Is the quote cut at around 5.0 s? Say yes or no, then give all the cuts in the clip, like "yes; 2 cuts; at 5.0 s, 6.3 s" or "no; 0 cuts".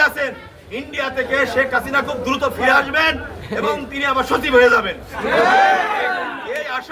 no; 0 cuts